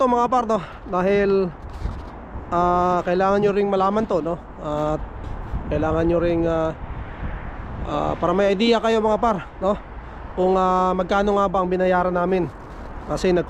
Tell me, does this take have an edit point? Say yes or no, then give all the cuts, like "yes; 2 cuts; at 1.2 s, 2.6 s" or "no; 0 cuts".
no; 0 cuts